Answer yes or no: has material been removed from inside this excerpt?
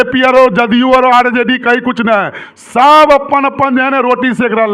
no